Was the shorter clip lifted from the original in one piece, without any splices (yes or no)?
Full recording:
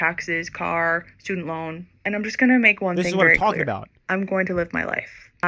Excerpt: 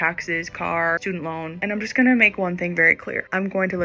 no